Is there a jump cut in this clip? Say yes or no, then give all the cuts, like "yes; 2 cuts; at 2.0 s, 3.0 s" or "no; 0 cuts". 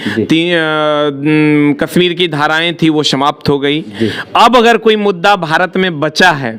no; 0 cuts